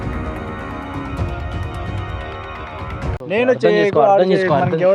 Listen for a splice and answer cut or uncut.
uncut